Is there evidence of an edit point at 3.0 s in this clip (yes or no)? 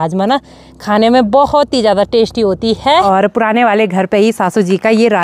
yes